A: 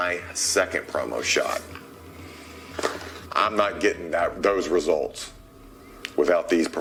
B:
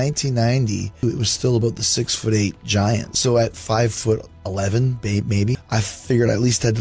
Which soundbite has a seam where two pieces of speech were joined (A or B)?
B